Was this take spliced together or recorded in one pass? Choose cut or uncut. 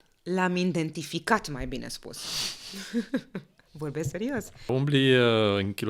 cut